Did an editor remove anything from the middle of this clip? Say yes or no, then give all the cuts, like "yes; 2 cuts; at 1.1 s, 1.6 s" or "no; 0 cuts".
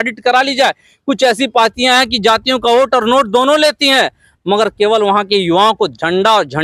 no; 0 cuts